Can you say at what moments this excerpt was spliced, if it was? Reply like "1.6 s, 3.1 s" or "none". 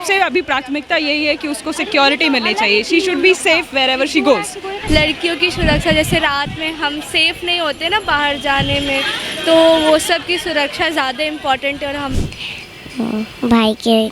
4.8 s, 12.1 s